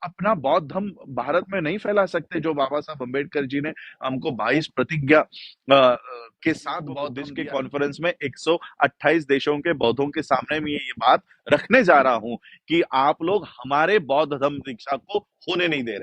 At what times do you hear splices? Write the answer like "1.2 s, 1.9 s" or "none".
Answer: 7.2 s